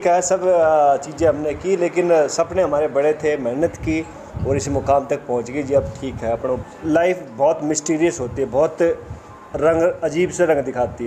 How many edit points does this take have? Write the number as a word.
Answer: one